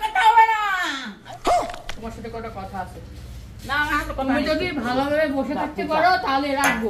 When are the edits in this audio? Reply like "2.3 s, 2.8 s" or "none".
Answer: 1.9 s